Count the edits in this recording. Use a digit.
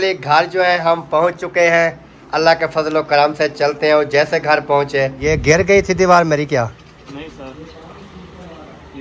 1